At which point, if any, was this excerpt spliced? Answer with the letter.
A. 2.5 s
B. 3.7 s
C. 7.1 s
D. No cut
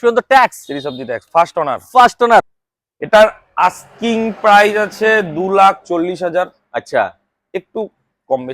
A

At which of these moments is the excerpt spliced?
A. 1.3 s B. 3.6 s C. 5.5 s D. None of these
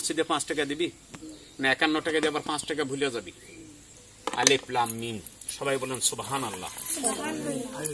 D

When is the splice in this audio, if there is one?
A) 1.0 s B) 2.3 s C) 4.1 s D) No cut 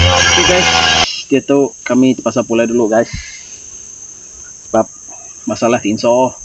A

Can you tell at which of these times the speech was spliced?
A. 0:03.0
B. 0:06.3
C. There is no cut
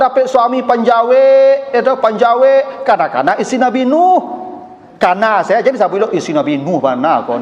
C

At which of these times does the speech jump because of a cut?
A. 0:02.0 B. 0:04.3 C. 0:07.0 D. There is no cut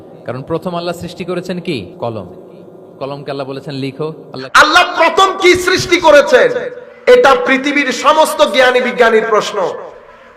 B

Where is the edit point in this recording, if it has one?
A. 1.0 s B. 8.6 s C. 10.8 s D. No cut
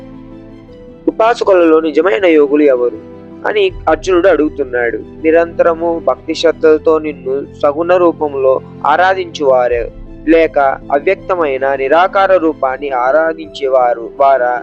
A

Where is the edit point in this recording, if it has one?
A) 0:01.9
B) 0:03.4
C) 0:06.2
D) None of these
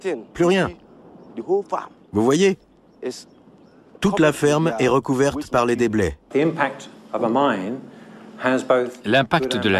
C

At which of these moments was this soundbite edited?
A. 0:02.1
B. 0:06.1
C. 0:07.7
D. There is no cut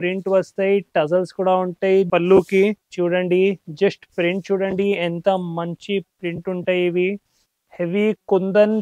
D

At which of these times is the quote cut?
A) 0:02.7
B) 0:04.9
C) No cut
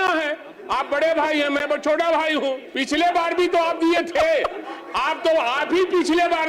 A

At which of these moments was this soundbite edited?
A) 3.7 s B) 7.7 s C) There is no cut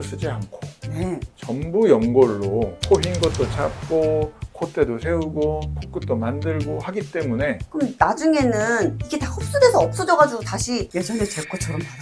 B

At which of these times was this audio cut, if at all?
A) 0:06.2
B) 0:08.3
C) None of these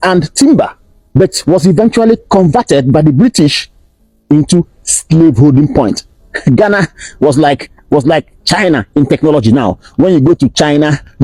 A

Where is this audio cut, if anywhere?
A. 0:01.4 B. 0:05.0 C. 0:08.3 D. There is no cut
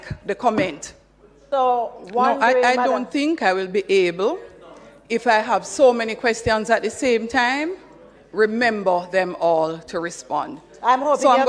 A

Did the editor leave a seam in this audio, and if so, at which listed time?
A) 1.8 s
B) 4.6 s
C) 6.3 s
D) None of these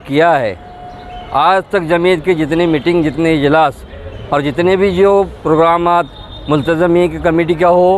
D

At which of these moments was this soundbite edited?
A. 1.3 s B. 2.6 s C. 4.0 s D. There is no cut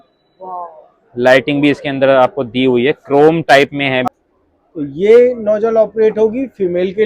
C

